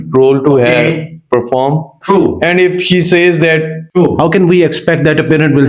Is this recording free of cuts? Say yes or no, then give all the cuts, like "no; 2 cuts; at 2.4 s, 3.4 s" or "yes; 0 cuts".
no; 1 cut; at 3.8 s